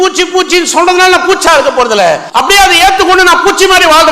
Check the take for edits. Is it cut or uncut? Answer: cut